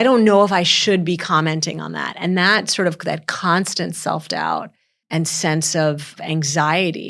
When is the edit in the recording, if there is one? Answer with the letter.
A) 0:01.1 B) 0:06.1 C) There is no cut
B